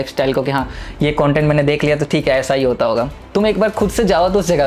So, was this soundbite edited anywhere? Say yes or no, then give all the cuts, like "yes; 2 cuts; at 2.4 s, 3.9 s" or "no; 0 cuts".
no; 0 cuts